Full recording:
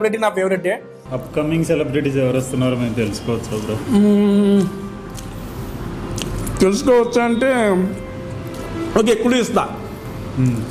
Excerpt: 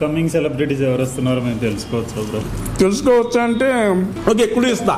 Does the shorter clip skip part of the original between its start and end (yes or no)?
yes